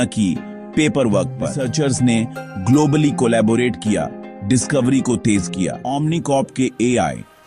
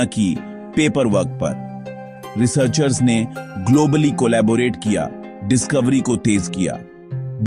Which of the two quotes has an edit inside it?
first; 2 cuts; at 1.6 s, 5.9 s

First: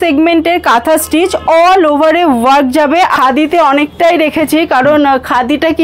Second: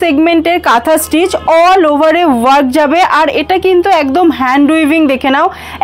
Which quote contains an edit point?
first; 1 cut; at 3.1 s

